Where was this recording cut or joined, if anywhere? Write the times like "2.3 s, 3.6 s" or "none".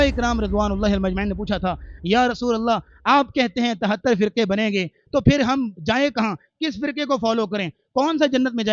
none